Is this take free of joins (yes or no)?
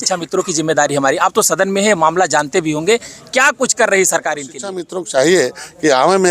no